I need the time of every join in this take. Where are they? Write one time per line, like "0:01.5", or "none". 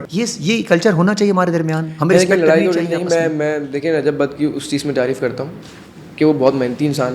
none